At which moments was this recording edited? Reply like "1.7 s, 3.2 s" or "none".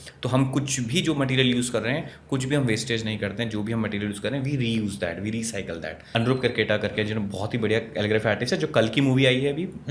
6.0 s